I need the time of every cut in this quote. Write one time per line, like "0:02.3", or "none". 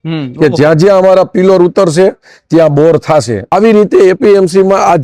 0:03.5